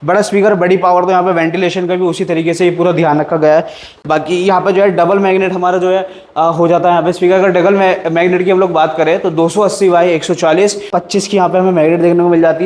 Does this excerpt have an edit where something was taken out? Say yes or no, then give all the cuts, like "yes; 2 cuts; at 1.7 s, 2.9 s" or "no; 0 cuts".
no; 0 cuts